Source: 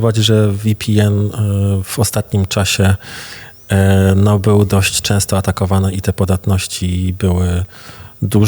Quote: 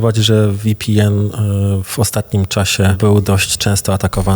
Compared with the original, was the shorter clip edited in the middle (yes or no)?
yes